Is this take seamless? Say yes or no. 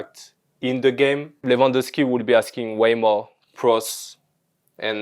no